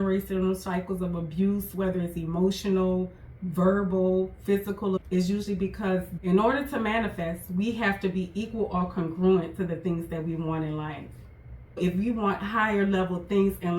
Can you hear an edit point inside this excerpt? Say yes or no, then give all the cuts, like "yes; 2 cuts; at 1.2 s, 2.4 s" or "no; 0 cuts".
yes; 3 cuts; at 5.0 s, 6.1 s, 11.8 s